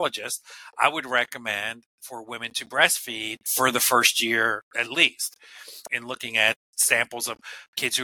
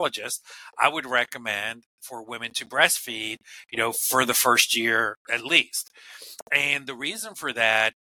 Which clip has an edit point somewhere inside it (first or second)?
first